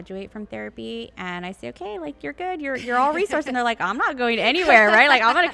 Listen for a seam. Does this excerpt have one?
no; 0 cuts

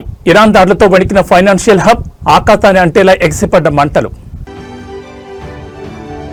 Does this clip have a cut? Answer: no; 0 cuts

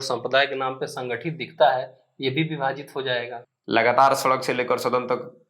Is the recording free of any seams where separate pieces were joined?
no; 1 cut; at 3.3 s

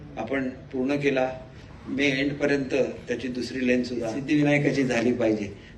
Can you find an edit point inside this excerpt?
yes; 1 cut; at 4.2 s

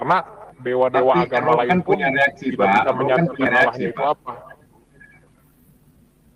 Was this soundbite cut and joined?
no; 0 cuts

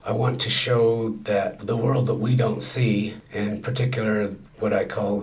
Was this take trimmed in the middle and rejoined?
no; 0 cuts

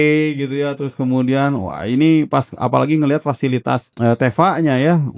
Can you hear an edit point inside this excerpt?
yes; 1 cut; at 3.8 s

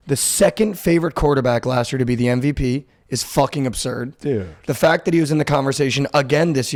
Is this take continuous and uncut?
yes; 0 cuts

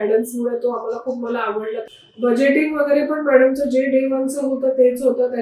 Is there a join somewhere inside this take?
yes; 1 cut; at 1.8 s

